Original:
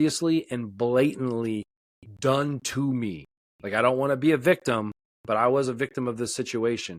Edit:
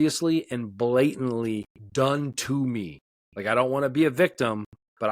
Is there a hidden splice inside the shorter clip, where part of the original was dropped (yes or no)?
yes